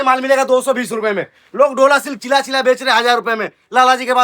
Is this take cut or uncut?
uncut